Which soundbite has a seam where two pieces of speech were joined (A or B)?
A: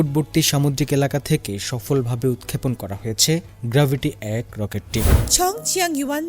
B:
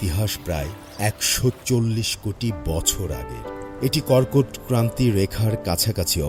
A